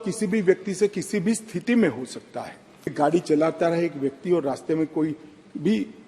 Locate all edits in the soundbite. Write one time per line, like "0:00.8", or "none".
0:02.9